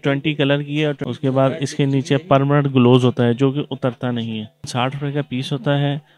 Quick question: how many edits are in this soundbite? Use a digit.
2